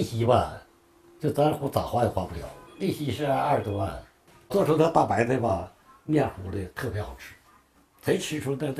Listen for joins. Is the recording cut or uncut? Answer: cut